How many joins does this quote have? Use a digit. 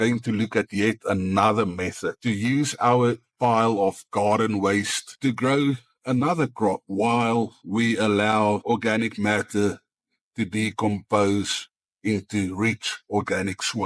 3